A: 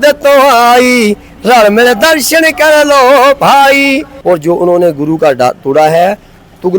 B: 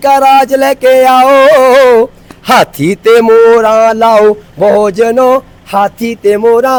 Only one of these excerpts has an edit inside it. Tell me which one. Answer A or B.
A